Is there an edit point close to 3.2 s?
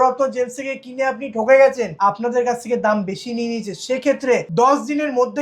no; 2 cuts; at 1.9 s, 4.5 s

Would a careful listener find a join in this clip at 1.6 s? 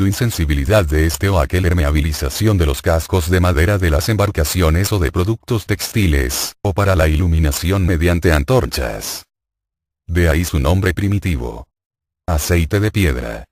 no; 0 cuts

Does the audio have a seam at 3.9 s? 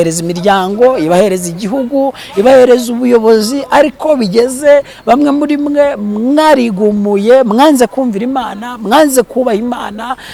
no; 0 cuts

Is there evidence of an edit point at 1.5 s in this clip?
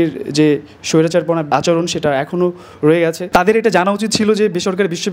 yes; 2 cuts; at 1.5 s, 3.2 s

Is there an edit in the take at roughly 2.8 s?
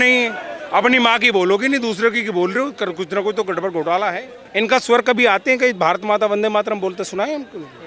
no; 1 cut; at 4.4 s

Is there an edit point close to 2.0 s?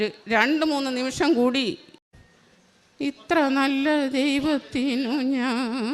yes; 1 cut; at 2.0 s

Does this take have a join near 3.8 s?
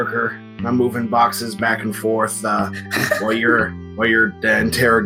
yes; 1 cut; at 3.8 s

